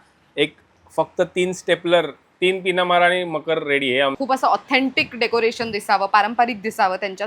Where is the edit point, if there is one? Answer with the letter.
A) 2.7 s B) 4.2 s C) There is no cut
B